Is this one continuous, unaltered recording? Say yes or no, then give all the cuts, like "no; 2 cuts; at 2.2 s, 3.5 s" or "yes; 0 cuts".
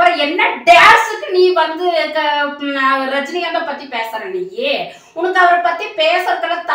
yes; 0 cuts